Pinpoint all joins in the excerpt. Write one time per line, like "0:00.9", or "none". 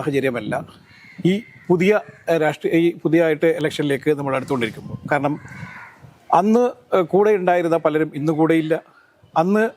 none